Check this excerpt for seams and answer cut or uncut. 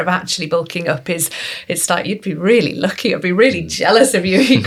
uncut